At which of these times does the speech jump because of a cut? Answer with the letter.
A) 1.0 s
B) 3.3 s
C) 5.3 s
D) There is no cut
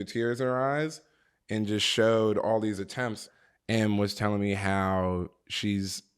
B